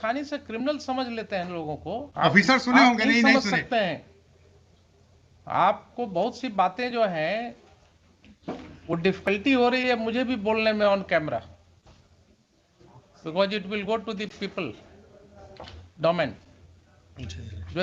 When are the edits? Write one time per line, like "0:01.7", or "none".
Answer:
0:02.1